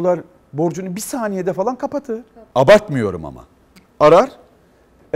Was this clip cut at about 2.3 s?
yes; 1 cut; at 2.3 s

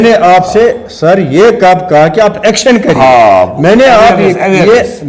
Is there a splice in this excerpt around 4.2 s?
no; 0 cuts

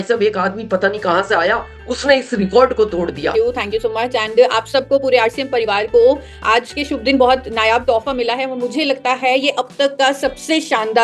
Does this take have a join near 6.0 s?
no; 1 cut; at 3.3 s

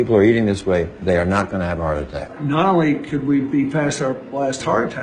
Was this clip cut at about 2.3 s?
yes; 1 cut; at 2.3 s

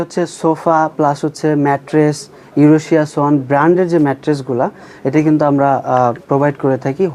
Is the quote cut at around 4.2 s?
no; 0 cuts

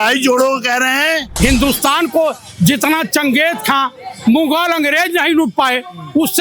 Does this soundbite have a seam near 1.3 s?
yes; 1 cut; at 1.3 s

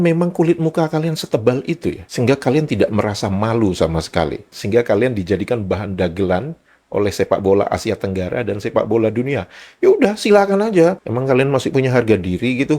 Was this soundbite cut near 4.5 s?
yes; 2 cuts; at 4.5 s, 11.0 s

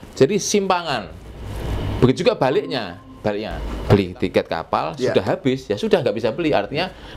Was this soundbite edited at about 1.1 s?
no; 1 cut; at 3.6 s

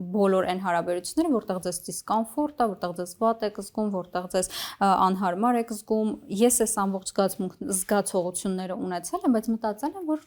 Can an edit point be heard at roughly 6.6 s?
no; 0 cuts

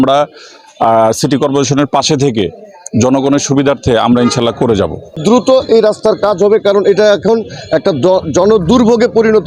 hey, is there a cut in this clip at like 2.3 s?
no; 1 cut; at 5.2 s

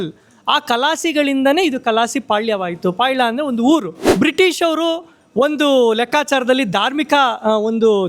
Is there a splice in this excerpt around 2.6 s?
no; 1 cut; at 4.0 s

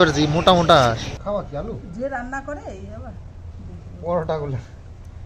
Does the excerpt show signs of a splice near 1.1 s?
yes; 1 cut; at 1.1 s

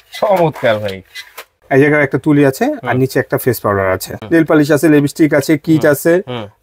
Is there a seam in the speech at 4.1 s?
yes; 2 cuts; at 1.6 s, 4.1 s

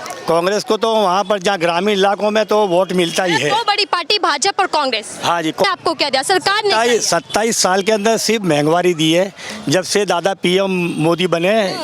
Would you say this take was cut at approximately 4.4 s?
no; 1 cut; at 5.6 s

